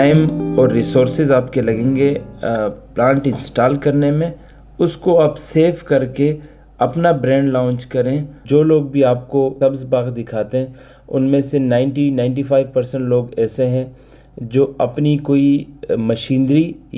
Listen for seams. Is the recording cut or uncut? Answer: cut